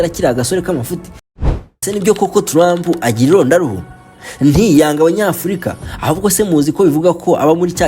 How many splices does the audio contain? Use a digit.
1